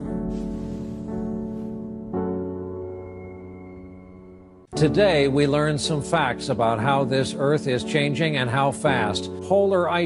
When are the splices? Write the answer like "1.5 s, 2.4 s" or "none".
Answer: 1.2 s